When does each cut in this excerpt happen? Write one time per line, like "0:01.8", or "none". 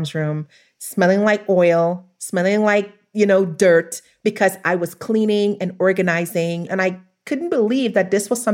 0:06.7